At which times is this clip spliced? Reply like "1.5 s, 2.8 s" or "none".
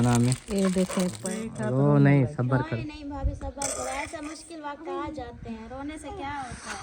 1.2 s